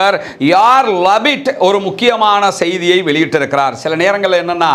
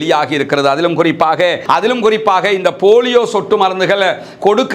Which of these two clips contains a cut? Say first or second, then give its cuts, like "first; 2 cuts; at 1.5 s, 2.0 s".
second; 1 cut; at 1.6 s